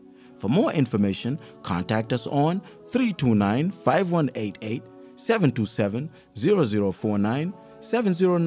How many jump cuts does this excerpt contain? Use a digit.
0